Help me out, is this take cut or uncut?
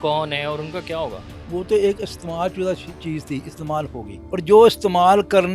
cut